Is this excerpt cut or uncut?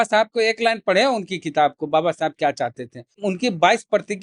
cut